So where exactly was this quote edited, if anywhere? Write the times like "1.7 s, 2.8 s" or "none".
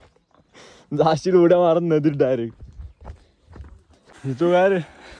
4.1 s